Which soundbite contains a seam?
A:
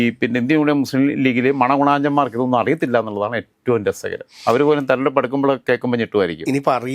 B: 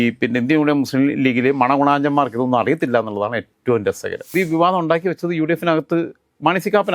B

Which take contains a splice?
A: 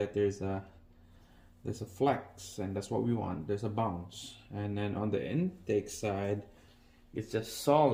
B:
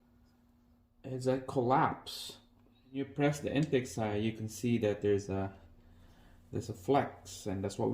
B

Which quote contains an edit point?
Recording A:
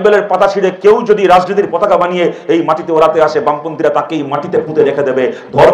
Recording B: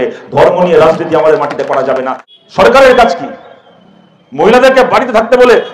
B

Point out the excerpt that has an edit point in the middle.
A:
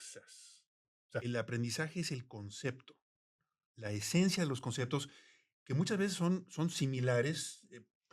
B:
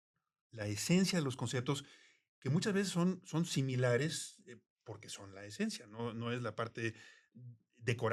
A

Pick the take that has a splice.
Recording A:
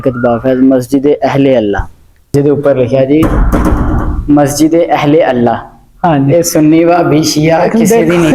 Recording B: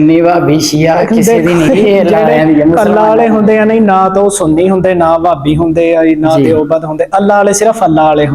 A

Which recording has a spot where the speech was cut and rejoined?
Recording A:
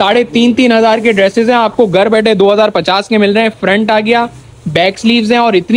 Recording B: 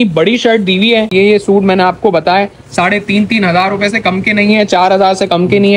B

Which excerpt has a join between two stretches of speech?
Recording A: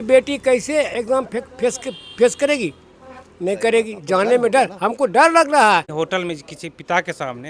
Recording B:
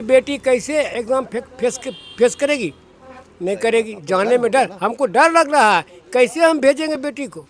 A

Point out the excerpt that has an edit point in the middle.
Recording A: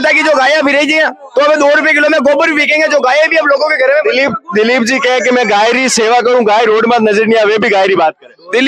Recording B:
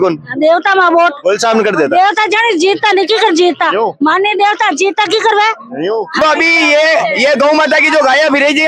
B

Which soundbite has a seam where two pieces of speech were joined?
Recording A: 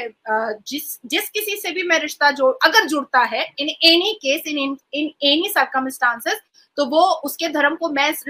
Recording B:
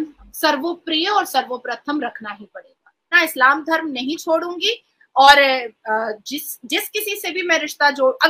B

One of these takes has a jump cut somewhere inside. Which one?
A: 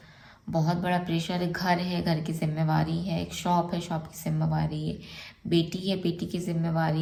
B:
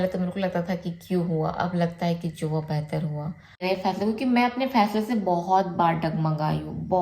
B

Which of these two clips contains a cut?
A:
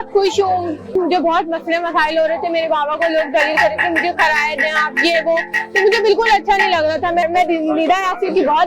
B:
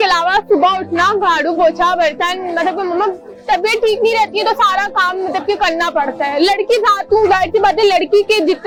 A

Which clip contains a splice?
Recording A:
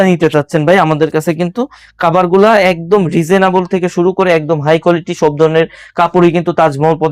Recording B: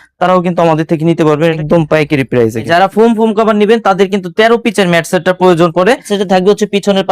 B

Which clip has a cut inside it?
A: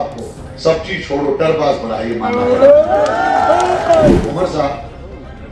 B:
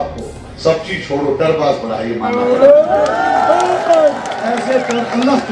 A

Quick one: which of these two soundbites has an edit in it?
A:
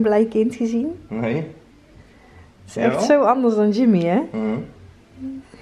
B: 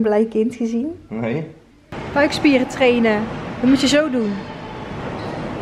B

